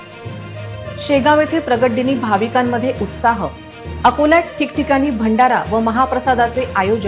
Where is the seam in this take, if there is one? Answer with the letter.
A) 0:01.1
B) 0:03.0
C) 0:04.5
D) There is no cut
A